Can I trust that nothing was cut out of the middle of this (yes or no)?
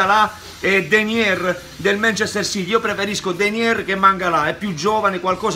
yes